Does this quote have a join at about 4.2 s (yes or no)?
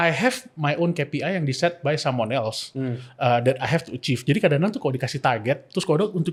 no